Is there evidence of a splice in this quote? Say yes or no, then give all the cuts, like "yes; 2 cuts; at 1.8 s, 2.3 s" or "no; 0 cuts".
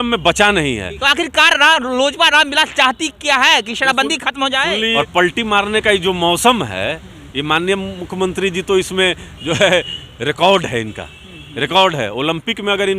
yes; 2 cuts; at 1.0 s, 4.9 s